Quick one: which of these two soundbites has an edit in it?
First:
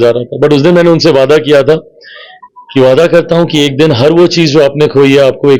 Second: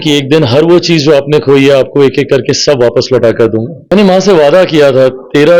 second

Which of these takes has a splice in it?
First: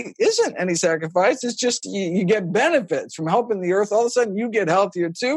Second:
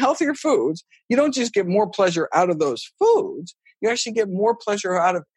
first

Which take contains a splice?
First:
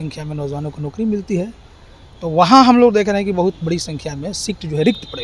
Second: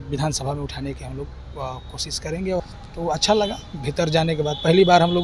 second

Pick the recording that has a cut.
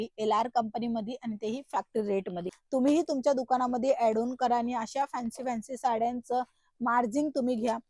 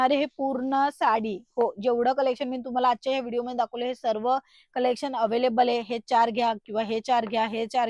first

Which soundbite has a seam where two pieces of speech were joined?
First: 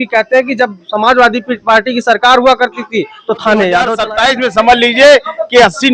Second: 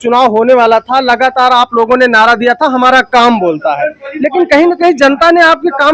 first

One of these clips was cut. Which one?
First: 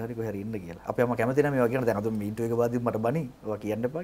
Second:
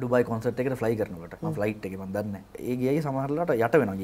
second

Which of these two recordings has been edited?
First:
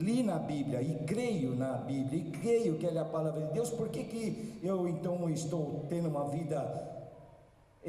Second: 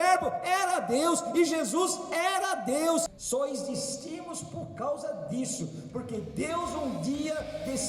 second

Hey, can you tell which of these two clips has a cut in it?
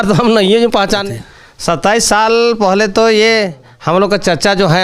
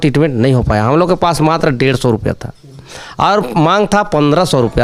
first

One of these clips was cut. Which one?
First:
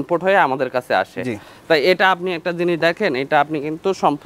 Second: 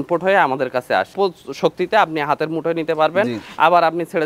second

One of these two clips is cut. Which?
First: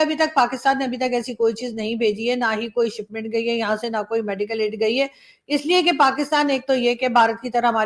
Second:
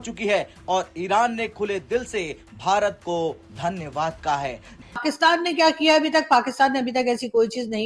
second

